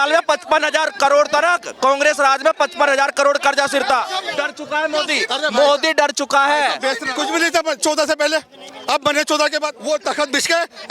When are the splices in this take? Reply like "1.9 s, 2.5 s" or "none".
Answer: 4.3 s, 7.1 s, 9.7 s